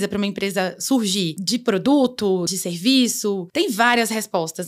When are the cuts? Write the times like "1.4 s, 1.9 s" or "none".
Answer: 1.4 s, 2.5 s, 3.4 s